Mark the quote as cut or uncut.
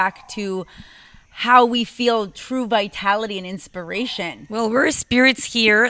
uncut